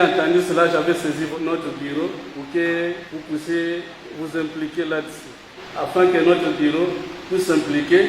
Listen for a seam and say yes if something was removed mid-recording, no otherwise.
yes